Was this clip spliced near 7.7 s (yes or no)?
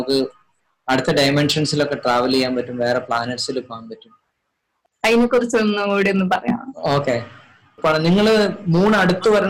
yes